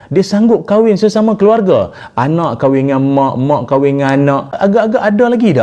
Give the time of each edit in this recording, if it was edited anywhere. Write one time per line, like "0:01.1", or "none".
0:04.6